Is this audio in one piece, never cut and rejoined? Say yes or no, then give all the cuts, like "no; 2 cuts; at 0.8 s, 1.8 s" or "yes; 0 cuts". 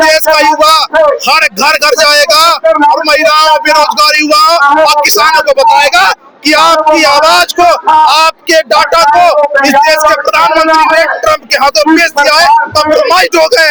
yes; 0 cuts